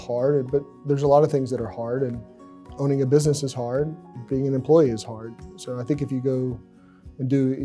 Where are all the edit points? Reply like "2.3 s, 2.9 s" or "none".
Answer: none